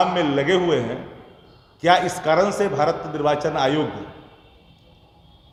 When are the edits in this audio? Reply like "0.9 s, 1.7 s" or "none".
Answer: none

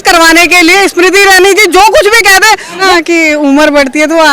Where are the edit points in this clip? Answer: 2.9 s

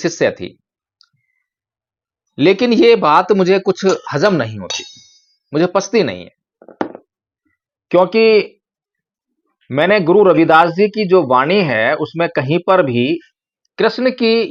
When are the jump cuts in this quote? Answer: none

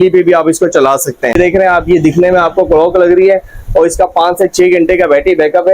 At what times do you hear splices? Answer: 1.4 s

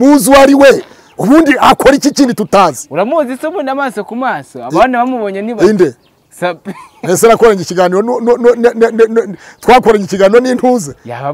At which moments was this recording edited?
none

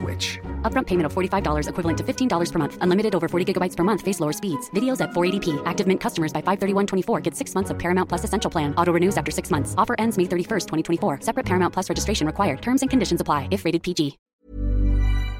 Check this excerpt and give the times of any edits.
14.2 s

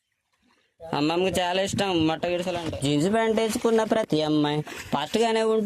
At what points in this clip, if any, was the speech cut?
2.6 s

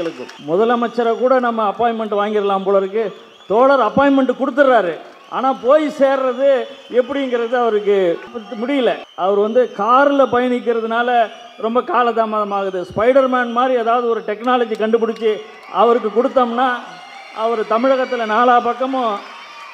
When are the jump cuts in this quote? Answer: none

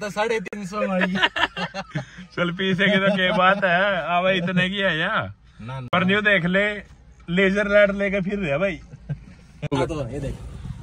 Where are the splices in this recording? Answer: 9.7 s

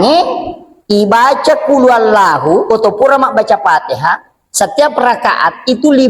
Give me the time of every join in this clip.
none

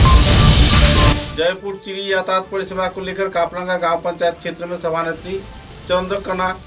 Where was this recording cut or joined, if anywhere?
1.2 s

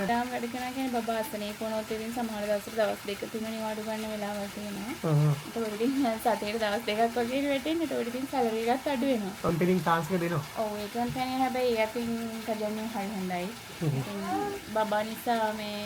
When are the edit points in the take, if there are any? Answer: none

